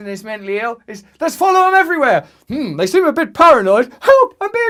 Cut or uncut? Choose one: uncut